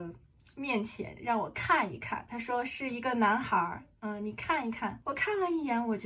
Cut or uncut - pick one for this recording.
cut